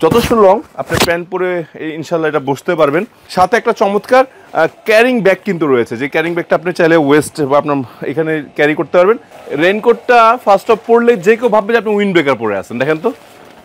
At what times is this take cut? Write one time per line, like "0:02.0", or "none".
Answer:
0:03.2
0:09.4